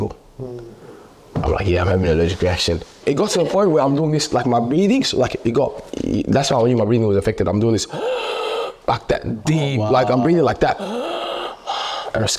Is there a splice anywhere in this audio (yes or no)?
yes